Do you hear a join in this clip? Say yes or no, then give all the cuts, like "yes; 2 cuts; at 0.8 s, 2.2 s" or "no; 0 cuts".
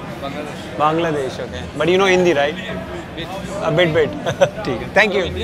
no; 0 cuts